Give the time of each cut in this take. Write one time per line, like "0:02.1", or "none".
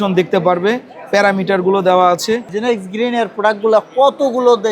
0:02.5